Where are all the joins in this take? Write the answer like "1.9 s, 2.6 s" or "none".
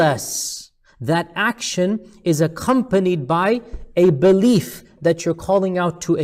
none